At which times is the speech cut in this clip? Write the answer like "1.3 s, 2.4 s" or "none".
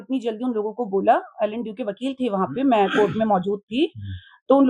none